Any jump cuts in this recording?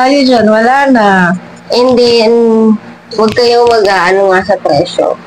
no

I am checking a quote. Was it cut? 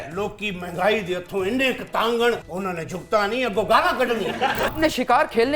yes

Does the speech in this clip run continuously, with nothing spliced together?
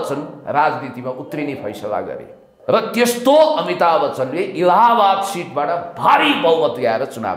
no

